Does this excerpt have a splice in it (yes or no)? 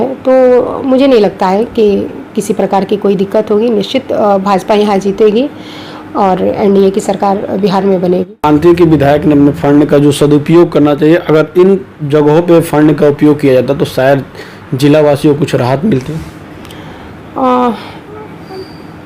yes